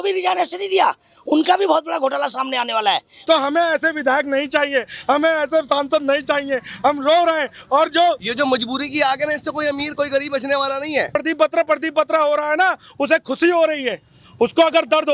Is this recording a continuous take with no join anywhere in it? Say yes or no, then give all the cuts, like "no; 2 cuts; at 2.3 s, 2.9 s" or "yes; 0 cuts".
no; 3 cuts; at 3.2 s, 8.3 s, 11.2 s